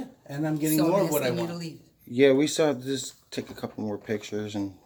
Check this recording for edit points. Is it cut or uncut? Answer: uncut